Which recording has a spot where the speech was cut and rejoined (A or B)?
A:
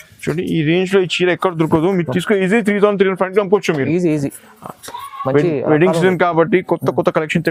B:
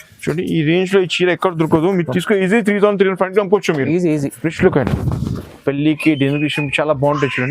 B